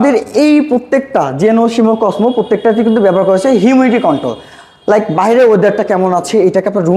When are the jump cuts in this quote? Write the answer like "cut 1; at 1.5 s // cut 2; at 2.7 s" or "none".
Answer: none